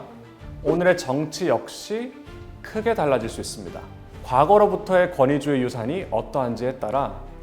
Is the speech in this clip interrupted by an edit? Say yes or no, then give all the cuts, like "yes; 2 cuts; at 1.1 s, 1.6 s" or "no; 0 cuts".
yes; 1 cut; at 4.3 s